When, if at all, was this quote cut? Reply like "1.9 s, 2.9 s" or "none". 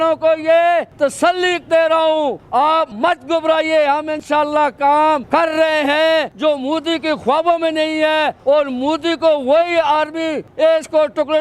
2.4 s, 6.4 s, 10.7 s

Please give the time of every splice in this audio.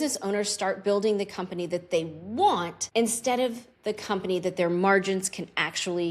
2.8 s

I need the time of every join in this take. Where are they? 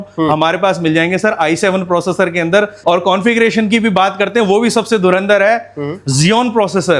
2.8 s

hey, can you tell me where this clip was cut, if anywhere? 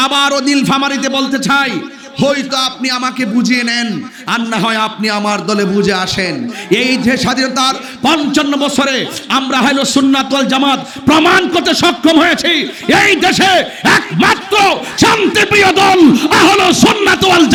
none

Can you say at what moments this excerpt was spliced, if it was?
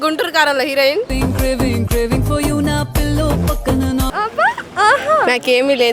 1.0 s, 4.1 s

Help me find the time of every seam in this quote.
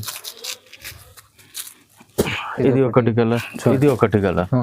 3.4 s

